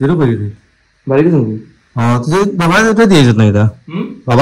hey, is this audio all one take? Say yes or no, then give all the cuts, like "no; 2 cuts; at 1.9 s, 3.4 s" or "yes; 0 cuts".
yes; 0 cuts